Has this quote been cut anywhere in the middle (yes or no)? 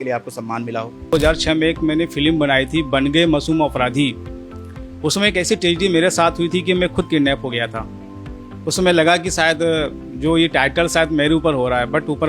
yes